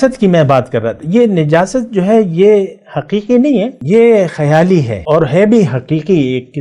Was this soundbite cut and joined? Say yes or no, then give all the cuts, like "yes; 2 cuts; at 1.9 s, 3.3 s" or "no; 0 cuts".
yes; 2 cuts; at 3.8 s, 5.0 s